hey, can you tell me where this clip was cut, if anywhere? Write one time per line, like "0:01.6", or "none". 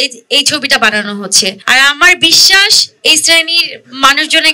0:01.6